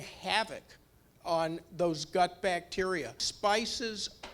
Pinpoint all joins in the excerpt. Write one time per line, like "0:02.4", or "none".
0:03.2